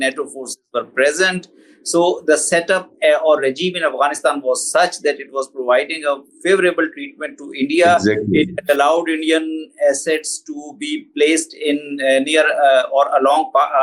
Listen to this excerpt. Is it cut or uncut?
uncut